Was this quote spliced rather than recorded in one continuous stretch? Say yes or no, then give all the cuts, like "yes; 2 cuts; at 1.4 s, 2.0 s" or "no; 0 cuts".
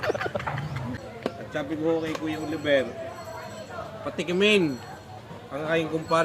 yes; 1 cut; at 0.9 s